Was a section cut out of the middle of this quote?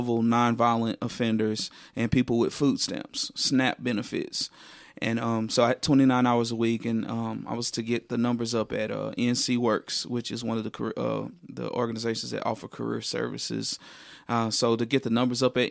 no; 0 cuts

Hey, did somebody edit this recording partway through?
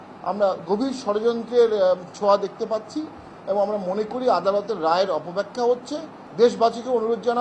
no; 0 cuts

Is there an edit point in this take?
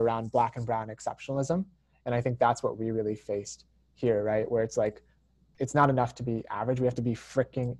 no; 0 cuts

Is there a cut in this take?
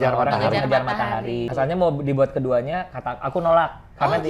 yes; 1 cut; at 1.5 s

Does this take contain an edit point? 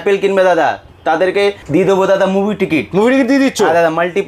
no; 0 cuts

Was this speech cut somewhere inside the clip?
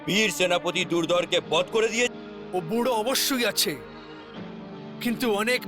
yes; 1 cut; at 2.1 s

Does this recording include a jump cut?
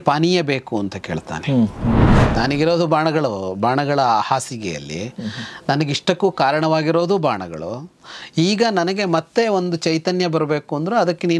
yes; 1 cut; at 2.2 s

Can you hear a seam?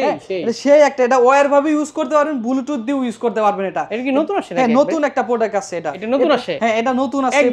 yes; 1 cut; at 6.0 s

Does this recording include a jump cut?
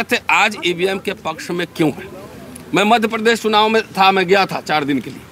no; 0 cuts

